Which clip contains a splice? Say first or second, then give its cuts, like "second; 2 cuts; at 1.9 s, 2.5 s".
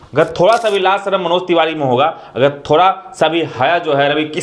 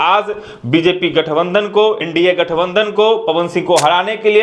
second; 1 cut; at 2.0 s